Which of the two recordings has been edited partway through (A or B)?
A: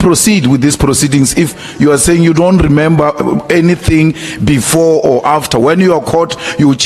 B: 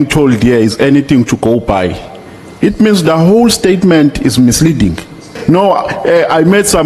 B